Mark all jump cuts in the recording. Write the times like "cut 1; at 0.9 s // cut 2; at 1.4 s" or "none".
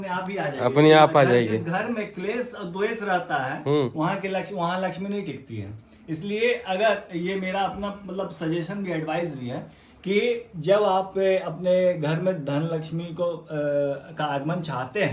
none